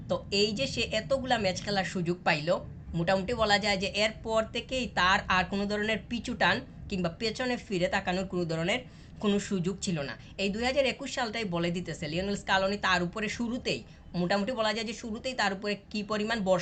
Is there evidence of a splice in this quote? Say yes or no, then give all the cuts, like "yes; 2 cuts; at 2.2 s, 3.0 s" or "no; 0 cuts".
no; 0 cuts